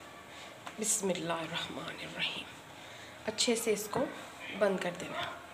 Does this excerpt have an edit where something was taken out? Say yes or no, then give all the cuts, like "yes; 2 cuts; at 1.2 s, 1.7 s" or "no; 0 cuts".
no; 0 cuts